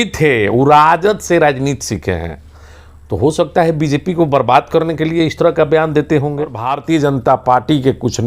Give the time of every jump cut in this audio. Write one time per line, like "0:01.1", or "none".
0:06.7